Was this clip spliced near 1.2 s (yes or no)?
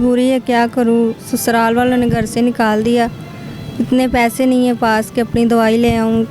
no